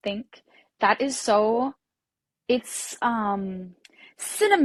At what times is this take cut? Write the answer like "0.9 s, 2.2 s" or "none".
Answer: none

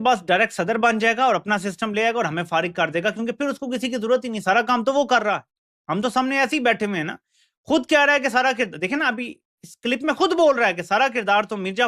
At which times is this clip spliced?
none

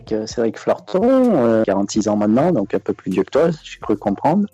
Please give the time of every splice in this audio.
1.6 s

